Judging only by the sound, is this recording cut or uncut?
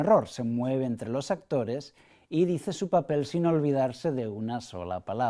uncut